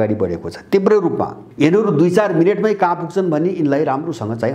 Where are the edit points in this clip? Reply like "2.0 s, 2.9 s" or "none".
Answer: 1.4 s